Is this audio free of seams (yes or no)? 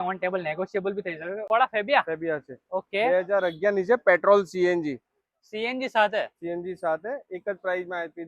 no